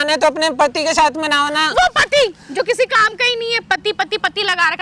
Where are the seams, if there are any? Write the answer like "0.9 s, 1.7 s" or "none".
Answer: none